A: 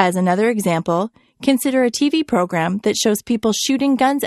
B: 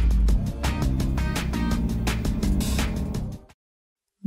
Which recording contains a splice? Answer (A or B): B